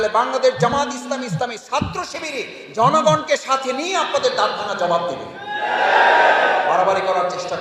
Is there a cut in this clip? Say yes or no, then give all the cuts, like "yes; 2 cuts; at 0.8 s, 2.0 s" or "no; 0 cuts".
no; 0 cuts